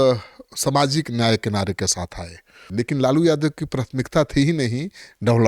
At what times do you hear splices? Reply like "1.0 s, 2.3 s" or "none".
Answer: 2.6 s